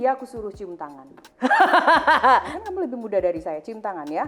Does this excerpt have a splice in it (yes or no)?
yes